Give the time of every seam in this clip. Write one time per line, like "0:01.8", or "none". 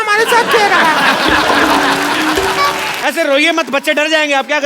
0:02.9